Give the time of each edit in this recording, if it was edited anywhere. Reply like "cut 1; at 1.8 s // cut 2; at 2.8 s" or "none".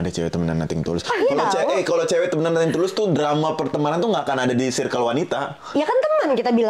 none